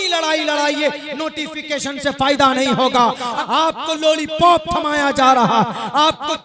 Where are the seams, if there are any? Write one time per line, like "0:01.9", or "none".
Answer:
0:03.4